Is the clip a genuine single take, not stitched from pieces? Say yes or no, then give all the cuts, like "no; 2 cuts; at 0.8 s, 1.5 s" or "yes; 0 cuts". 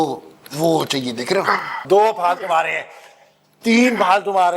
no; 1 cut; at 1.8 s